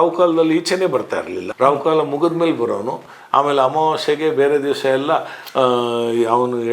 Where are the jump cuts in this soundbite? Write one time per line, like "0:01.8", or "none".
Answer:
0:01.5